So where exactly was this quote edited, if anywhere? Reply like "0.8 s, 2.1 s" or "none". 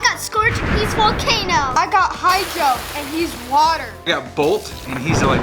1.7 s, 4.1 s